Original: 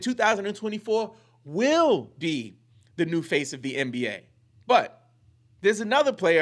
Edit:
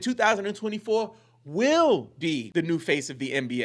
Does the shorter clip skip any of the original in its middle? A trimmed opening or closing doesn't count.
yes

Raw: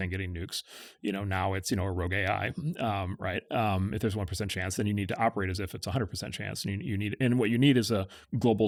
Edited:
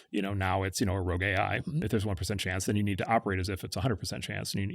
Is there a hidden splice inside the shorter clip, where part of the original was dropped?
yes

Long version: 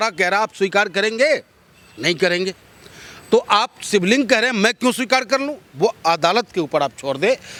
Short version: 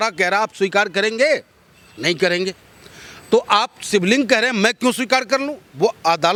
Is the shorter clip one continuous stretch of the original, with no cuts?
yes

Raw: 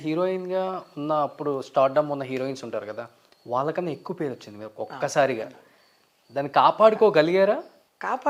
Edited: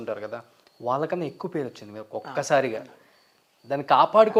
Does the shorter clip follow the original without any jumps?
yes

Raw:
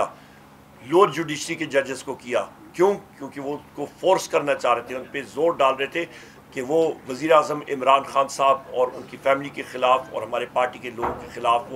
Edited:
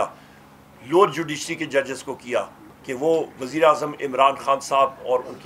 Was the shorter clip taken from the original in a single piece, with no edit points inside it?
no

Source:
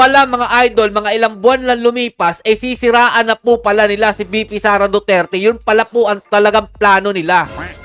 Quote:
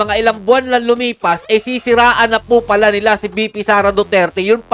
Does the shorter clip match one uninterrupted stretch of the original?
yes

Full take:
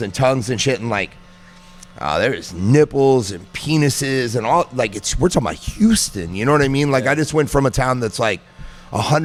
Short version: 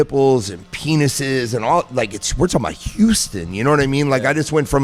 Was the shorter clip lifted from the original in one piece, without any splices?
yes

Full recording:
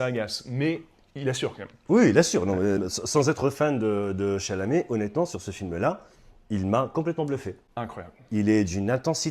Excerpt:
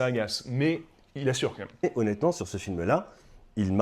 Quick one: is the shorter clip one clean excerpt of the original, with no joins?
no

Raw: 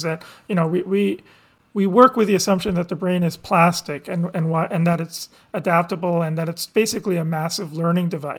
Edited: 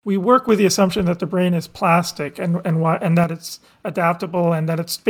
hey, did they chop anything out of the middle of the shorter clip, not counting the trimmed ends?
no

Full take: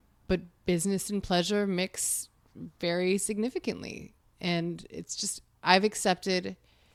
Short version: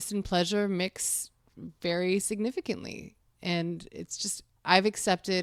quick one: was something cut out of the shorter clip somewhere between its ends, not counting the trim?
no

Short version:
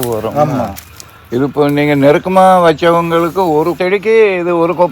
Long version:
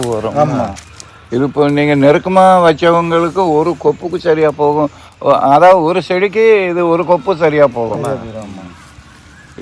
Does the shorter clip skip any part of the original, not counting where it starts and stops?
yes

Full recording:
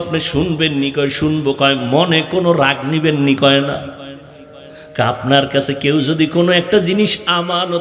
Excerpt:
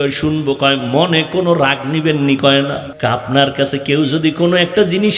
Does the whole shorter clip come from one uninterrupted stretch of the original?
no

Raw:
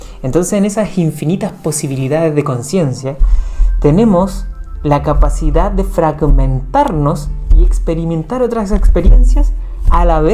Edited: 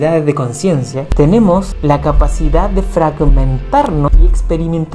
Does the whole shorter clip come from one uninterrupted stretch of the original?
no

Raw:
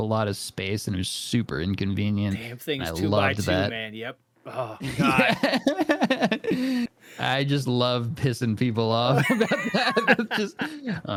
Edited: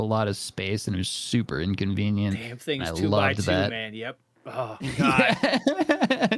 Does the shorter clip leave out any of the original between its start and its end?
no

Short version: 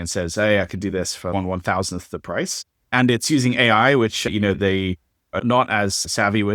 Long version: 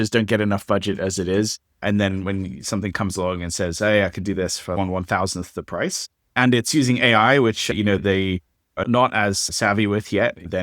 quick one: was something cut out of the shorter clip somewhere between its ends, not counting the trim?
no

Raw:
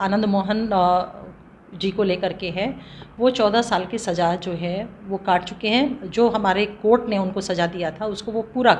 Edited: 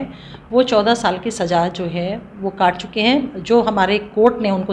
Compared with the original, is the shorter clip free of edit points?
yes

